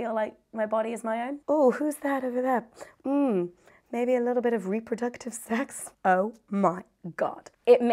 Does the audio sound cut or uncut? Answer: cut